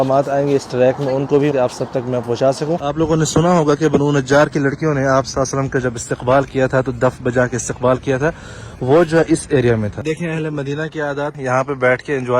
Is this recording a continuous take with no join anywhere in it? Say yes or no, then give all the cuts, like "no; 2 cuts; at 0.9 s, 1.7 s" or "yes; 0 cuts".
no; 4 cuts; at 1.5 s, 2.9 s, 10.0 s, 11.4 s